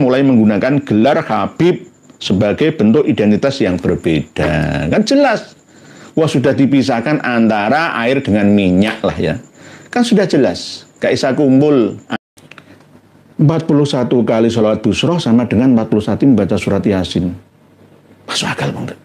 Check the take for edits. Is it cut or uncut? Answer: cut